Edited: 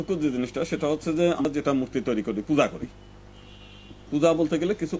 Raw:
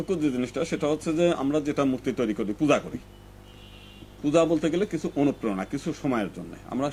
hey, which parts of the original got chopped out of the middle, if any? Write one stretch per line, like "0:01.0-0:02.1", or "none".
0:01.4-0:01.5